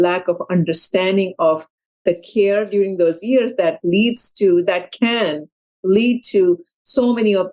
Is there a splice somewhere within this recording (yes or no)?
no